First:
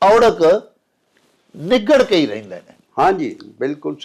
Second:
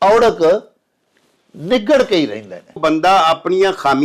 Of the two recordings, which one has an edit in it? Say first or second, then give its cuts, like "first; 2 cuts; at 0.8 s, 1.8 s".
second; 1 cut; at 2.8 s